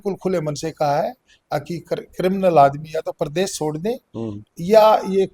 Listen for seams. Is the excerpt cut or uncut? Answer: uncut